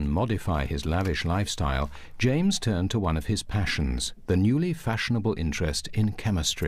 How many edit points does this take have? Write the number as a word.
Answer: one